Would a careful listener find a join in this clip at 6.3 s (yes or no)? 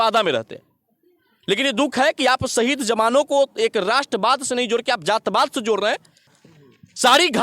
yes